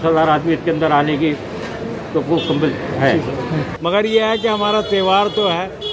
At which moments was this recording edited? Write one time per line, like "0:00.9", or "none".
0:03.7